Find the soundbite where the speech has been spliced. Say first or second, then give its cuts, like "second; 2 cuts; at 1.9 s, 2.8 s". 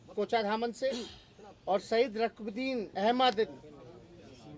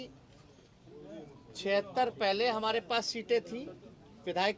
first; 1 cut; at 2.9 s